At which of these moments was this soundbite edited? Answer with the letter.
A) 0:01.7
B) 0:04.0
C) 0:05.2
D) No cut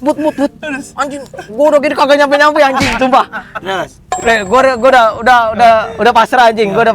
B